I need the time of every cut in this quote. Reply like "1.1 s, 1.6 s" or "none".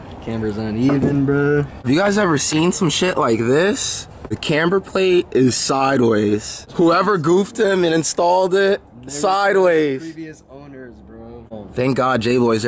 1.8 s, 4.4 s, 6.6 s, 11.5 s